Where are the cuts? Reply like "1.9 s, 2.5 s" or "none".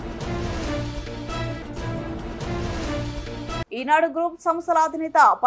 3.4 s